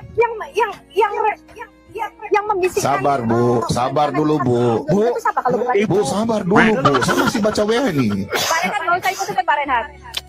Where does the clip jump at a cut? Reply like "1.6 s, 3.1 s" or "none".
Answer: none

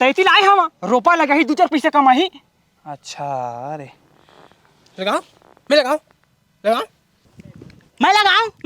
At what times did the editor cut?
7.3 s

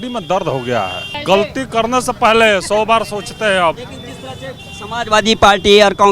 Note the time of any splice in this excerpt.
1.1 s

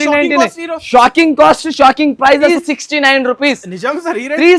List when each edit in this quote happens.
2.5 s

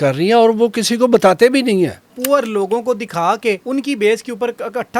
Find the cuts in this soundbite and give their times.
2.2 s, 3.6 s

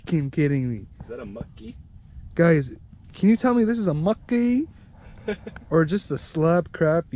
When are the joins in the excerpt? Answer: none

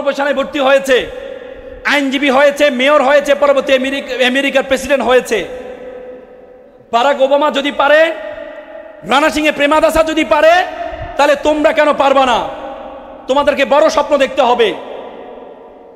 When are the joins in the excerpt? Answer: none

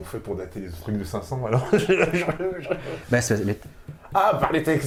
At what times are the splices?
none

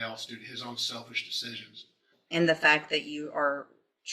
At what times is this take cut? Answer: 2.2 s

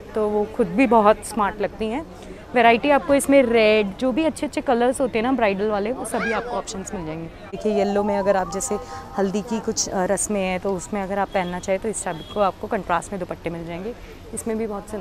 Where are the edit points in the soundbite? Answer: 7.6 s

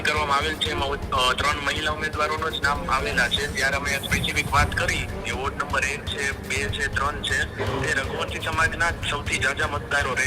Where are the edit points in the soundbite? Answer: none

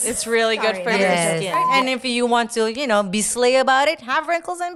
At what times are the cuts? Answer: 1.7 s

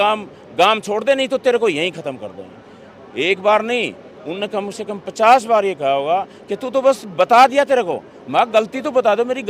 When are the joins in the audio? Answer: none

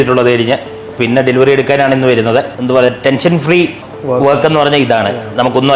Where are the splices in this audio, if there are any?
2.5 s

